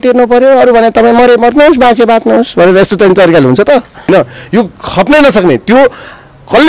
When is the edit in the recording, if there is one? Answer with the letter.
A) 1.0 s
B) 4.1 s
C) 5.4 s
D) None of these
B